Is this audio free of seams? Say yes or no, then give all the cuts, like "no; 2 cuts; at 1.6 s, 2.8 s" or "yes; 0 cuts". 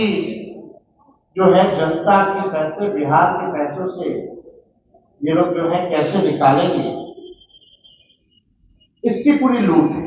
yes; 0 cuts